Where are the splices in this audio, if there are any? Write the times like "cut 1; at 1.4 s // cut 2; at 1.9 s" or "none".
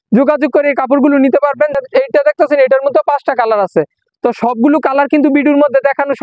cut 1; at 1.8 s